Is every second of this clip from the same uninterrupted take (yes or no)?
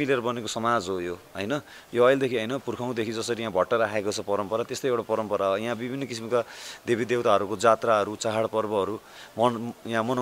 yes